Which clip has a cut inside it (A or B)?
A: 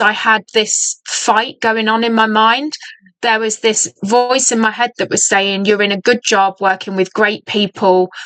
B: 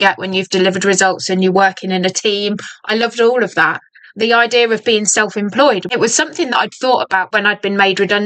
B